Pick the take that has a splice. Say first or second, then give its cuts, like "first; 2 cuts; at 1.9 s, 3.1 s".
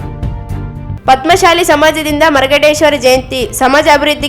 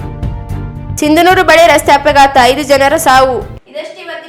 first; 1 cut; at 0.9 s